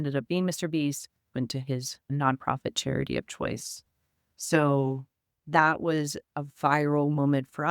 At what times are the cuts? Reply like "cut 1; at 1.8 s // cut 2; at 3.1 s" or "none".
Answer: cut 1; at 1.3 s

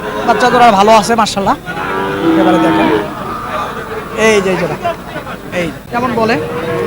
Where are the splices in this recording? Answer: cut 1; at 5.8 s

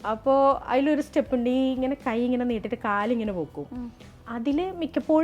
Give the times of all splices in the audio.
none

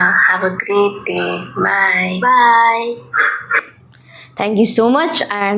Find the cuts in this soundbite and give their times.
none

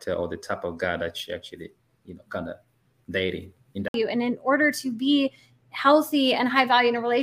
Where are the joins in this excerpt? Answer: cut 1; at 3.9 s

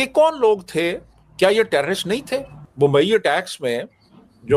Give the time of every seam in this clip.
cut 1; at 2.6 s

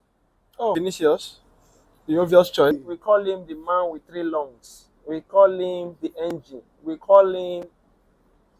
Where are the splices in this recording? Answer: cut 1; at 0.8 s // cut 2; at 2.9 s

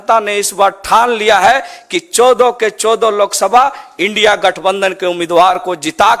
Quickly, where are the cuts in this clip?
none

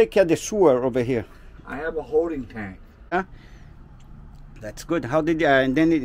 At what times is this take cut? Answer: cut 1; at 3.1 s

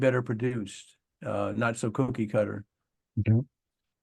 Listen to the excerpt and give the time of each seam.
none

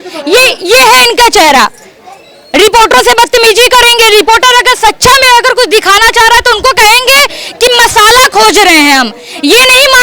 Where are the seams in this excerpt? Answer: none

